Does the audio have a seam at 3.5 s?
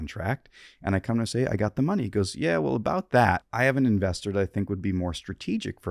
yes; 1 cut; at 3.5 s

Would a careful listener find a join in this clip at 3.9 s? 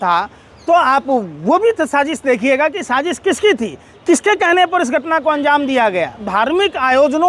no; 1 cut; at 6.2 s

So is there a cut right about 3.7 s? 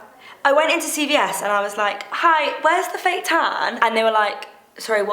yes; 1 cut; at 3.7 s

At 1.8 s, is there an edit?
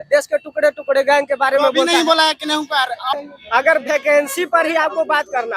no; 1 cut; at 3.1 s

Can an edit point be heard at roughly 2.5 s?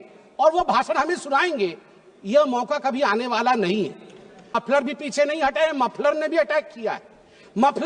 no; 1 cut; at 4.5 s

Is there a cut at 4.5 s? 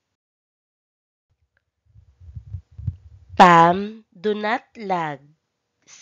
yes; 1 cut; at 4.5 s

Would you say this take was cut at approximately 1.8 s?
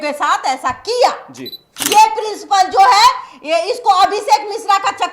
yes; 1 cut; at 1.8 s

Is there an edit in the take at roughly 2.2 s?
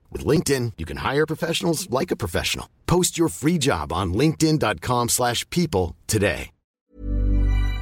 no; 1 cut; at 6.9 s

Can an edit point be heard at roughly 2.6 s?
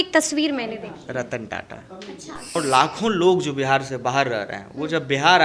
yes; 1 cut; at 2.6 s

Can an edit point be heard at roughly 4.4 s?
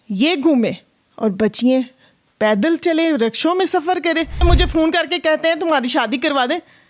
yes; 1 cut; at 4.4 s

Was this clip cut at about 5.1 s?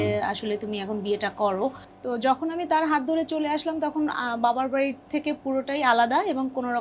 no; 1 cut; at 1.8 s

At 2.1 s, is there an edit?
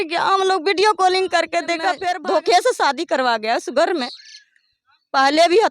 yes; 1 cut; at 2.1 s

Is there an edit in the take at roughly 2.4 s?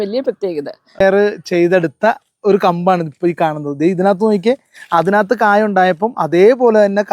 no; 1 cut; at 1.0 s

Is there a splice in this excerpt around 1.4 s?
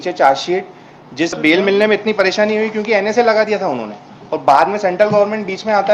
yes; 1 cut; at 1.4 s

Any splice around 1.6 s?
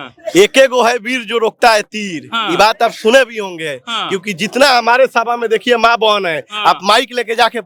no; 0 cuts

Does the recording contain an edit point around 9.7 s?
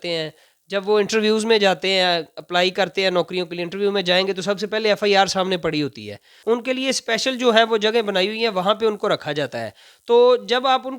no; 1 cut; at 6.3 s

